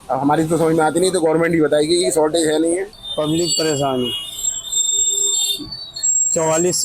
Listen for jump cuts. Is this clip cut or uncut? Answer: cut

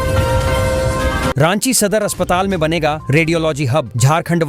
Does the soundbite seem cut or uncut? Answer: cut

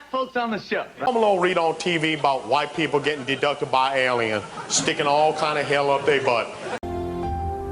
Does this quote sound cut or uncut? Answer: cut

